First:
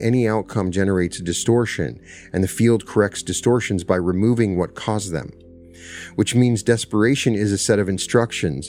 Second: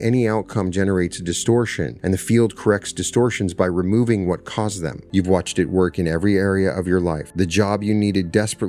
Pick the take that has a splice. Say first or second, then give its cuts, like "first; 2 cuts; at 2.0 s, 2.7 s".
second; 3 cuts; at 1.9 s, 4.9 s, 7.2 s